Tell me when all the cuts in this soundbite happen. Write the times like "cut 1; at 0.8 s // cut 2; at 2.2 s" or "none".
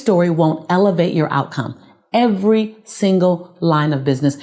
none